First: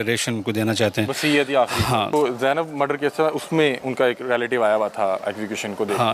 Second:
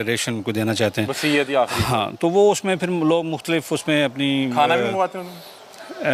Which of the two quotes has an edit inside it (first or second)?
first